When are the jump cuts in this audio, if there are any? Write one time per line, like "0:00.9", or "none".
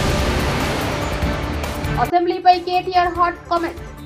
0:01.8

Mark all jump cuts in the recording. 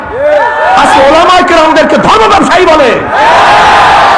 none

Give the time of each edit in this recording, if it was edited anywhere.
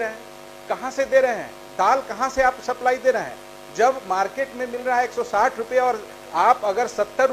none

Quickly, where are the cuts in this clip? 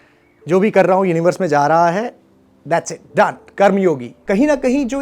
0:04.1

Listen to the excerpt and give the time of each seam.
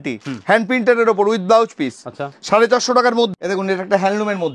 0:03.3

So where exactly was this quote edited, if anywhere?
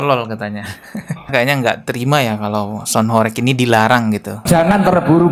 0:01.2

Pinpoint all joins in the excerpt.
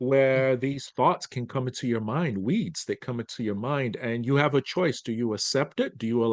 none

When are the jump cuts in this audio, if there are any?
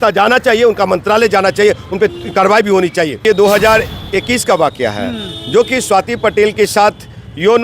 0:03.2

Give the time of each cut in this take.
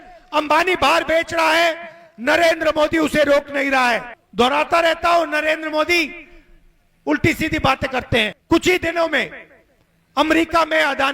0:04.2
0:08.4

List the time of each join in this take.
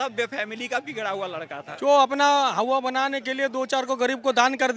0:01.7

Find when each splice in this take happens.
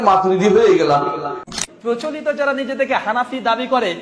0:01.5

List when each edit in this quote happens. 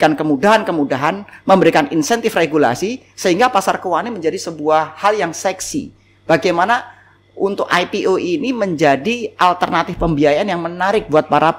none

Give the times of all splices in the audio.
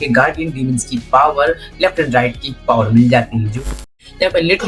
0:03.7

